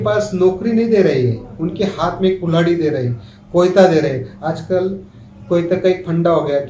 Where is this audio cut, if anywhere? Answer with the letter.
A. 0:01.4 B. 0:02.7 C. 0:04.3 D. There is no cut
D